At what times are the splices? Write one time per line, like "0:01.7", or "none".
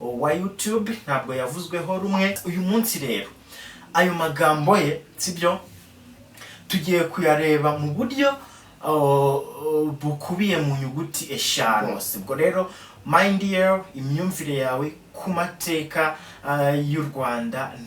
0:02.4
0:11.8